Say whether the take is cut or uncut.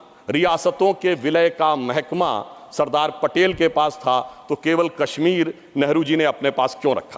uncut